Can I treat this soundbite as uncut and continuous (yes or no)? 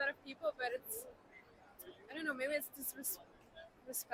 yes